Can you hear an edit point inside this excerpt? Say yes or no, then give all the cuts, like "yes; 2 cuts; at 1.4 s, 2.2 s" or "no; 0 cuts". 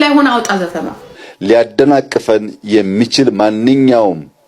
yes; 1 cut; at 1.4 s